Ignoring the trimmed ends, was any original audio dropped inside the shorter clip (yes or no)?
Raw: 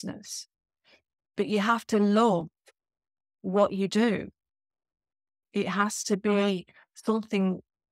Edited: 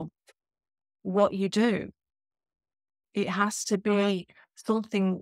no